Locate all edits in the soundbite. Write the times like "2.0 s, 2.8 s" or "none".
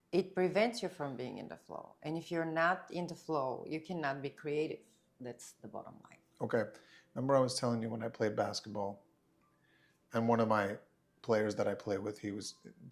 none

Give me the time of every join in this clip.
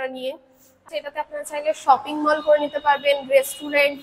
0.9 s

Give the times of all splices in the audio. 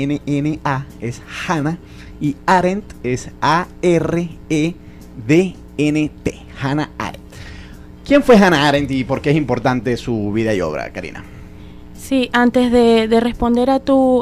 none

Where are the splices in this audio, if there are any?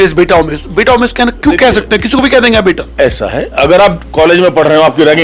none

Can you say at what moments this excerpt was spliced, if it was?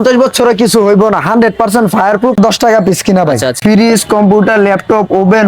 2.4 s, 3.6 s

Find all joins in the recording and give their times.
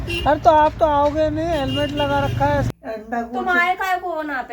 2.7 s

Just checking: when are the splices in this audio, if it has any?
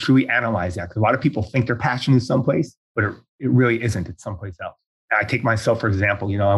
2.8 s, 4.9 s

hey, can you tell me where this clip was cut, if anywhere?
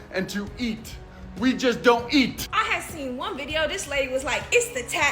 2.4 s

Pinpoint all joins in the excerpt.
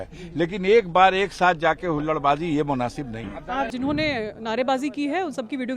3.7 s

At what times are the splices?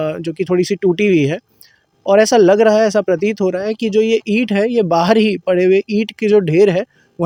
none

